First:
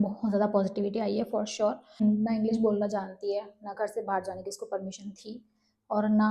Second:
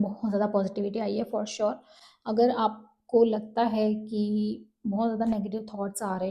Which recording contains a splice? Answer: first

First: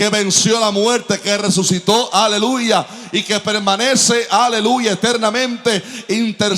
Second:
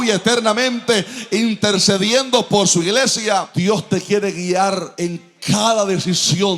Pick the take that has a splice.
second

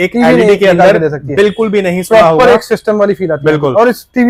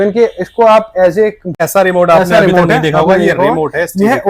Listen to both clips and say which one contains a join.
second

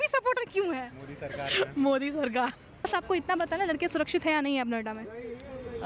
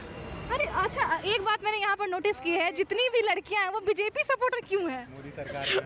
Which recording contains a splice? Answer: first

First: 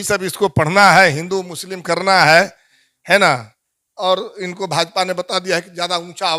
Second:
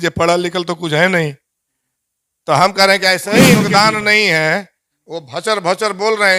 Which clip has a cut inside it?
second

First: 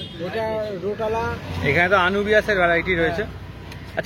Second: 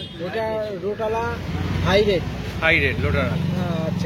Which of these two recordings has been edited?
first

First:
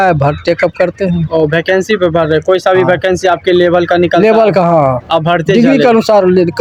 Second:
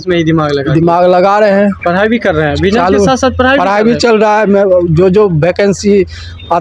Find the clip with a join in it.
second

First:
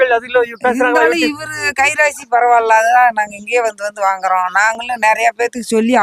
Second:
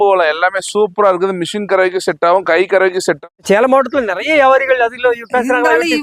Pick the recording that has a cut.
second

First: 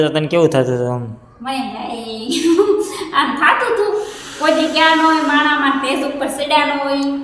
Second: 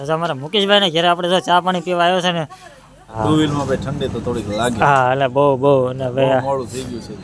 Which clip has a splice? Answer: second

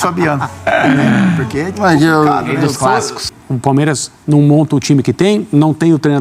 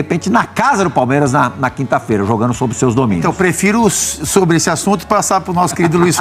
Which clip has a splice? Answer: first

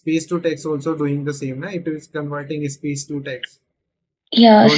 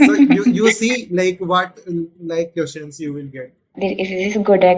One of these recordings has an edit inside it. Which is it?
second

